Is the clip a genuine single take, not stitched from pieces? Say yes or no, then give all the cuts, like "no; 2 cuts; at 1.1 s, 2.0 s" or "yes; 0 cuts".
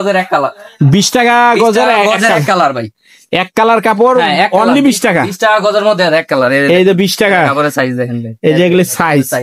yes; 0 cuts